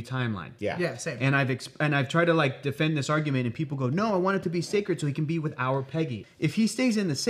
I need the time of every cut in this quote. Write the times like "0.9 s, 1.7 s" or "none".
6.2 s

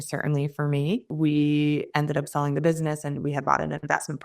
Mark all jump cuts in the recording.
1.1 s

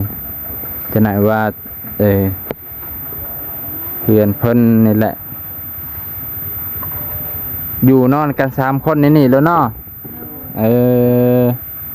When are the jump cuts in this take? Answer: none

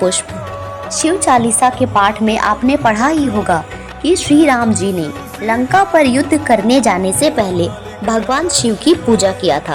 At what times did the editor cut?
none

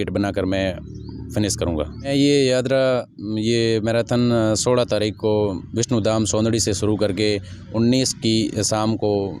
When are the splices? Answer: 2.1 s

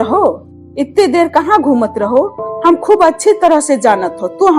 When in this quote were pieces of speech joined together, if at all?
none

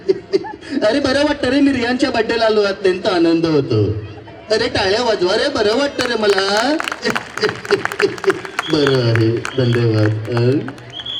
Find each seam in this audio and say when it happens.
none

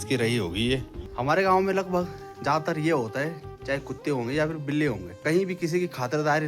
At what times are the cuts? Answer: 1.0 s, 5.1 s

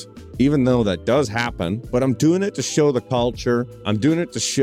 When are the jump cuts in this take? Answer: 1.8 s, 3.4 s

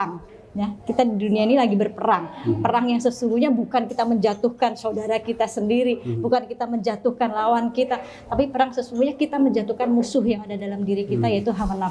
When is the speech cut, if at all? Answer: none

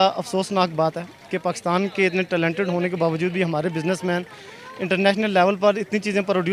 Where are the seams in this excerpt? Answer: none

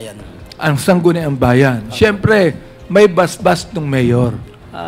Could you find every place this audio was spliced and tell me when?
none

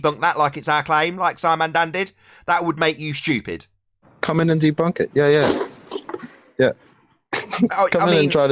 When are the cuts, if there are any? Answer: 4.1 s

